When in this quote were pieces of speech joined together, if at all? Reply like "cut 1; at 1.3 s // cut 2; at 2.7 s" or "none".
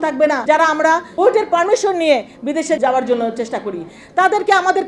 cut 1; at 0.8 s // cut 2; at 2.8 s